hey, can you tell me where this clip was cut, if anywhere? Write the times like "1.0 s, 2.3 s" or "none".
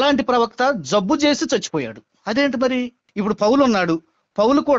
3.0 s